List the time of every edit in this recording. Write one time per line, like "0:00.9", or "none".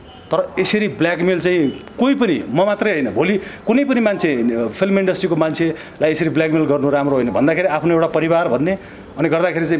none

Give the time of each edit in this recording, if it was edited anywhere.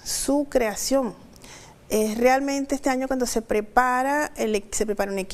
none

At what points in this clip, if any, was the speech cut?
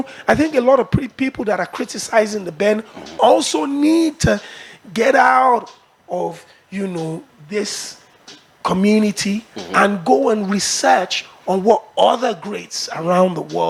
none

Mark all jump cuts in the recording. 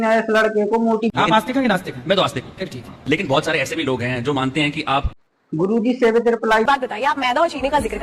0:01.1
0:05.2
0:06.6

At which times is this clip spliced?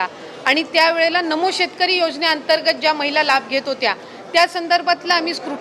none

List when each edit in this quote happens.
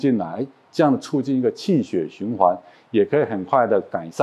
none

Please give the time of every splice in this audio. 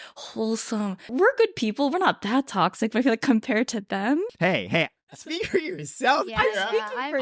0:01.1
0:04.3

